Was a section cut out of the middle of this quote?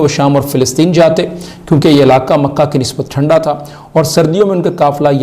no; 0 cuts

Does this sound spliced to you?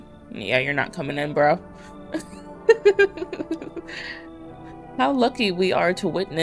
no; 0 cuts

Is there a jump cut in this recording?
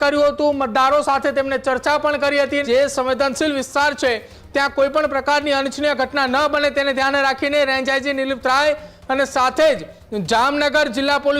yes; 1 cut; at 2.6 s

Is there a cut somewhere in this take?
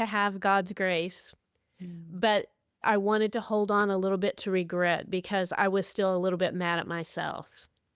yes; 1 cut; at 2.8 s

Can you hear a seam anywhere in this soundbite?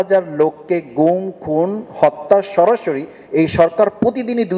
no; 0 cuts

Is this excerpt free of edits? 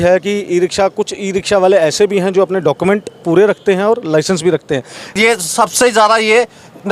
no; 1 cut; at 5.2 s

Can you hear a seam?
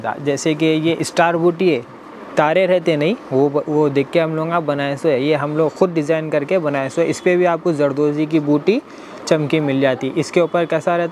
no; 0 cuts

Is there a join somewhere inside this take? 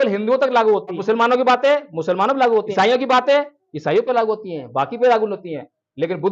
yes; 2 cuts; at 1.0 s, 2.7 s

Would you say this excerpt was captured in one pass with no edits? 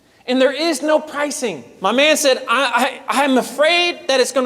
no; 1 cut; at 1.7 s

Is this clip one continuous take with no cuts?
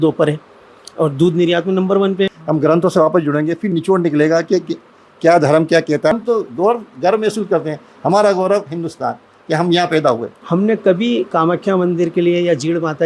no; 3 cuts; at 2.3 s, 6.1 s, 10.3 s

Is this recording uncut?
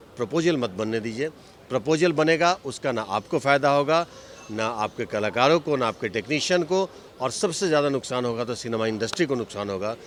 yes; 0 cuts

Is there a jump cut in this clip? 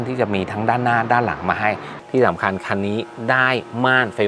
yes; 1 cut; at 1.9 s

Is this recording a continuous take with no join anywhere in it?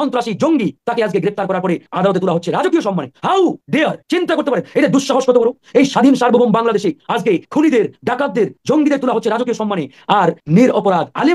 yes; 0 cuts

